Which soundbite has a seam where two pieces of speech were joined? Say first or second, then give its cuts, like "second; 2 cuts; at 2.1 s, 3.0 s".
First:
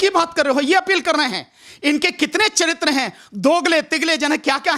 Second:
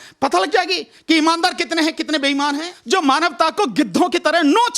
second; 1 cut; at 2.7 s